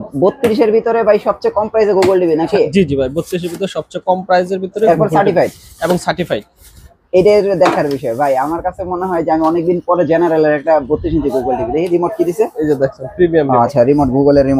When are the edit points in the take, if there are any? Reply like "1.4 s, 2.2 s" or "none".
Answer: none